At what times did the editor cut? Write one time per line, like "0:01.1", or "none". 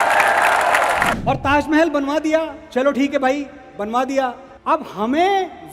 0:01.2
0:04.5

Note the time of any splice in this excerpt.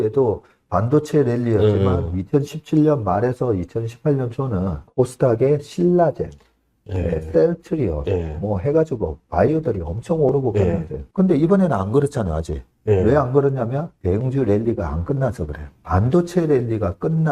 0:15.6

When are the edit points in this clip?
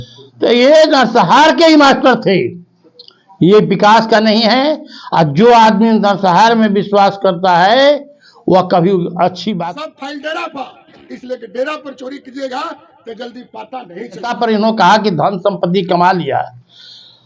0:09.6
0:14.4

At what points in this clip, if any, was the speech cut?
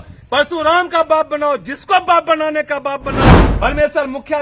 0:03.5

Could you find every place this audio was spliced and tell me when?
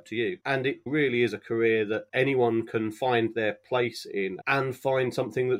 0:00.9
0:04.4

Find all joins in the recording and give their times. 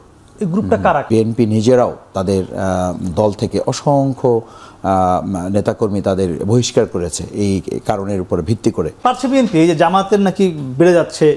0:01.0
0:09.0

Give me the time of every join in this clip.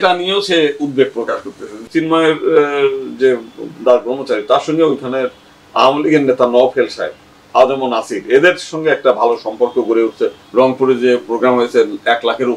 0:01.8
0:10.4

